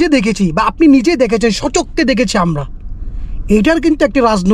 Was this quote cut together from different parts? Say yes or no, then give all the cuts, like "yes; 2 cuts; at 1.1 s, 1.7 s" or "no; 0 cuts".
no; 0 cuts